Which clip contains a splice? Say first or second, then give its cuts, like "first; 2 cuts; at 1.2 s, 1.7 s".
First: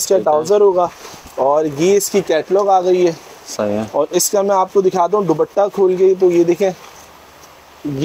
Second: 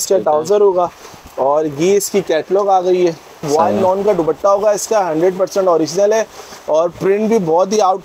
second; 1 cut; at 3.4 s